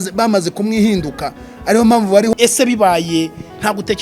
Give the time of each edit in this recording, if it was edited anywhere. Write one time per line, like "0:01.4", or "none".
0:02.3